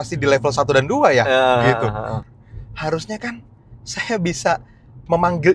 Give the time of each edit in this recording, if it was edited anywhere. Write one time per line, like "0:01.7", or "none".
0:02.1